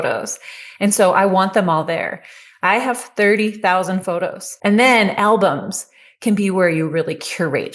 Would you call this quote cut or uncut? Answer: cut